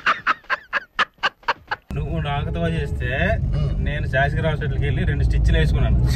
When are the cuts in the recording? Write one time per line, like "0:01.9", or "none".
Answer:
0:01.9